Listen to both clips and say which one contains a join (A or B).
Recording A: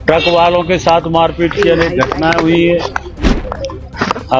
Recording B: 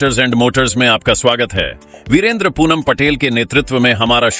A